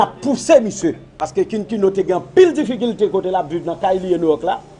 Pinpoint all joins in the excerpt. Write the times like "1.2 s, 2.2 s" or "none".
1.1 s